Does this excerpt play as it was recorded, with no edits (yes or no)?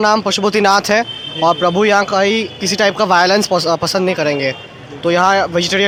yes